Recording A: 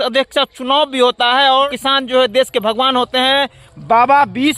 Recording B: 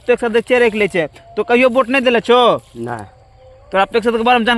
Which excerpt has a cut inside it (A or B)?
A